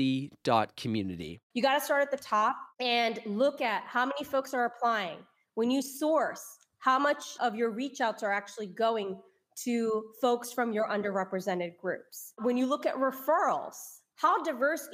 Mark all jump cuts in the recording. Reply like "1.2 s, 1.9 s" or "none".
1.3 s, 2.7 s, 7.3 s, 12.4 s